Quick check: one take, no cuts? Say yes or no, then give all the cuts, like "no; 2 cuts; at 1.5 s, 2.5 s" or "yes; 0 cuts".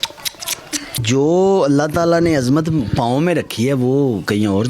no; 1 cut; at 0.9 s